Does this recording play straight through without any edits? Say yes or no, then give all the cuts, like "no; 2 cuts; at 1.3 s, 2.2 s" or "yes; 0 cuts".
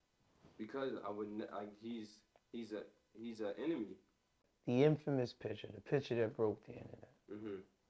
no; 1 cut; at 4.5 s